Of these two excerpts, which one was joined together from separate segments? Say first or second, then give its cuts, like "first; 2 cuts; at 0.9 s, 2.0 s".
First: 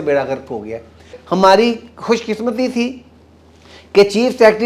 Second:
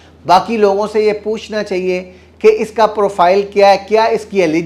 first; 1 cut; at 1.2 s